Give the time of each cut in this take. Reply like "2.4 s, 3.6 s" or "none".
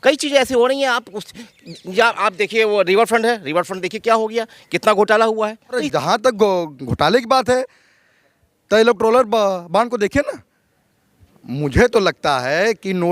5.9 s